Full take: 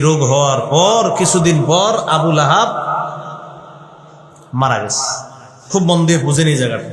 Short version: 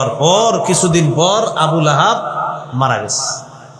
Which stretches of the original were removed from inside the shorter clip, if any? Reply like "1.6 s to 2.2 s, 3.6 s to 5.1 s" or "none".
3.2 s to 4.5 s